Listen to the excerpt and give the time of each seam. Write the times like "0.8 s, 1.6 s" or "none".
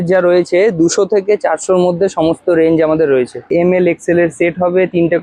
3.5 s